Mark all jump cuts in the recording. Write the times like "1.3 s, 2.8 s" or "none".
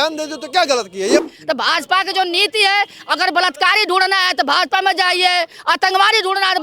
1.2 s